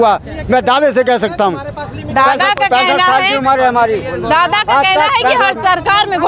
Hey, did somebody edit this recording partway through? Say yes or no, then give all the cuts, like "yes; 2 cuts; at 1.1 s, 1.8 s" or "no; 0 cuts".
no; 0 cuts